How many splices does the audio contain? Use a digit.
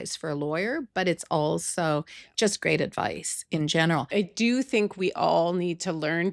1